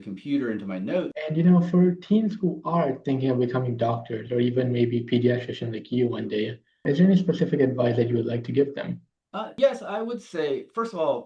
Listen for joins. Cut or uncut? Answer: cut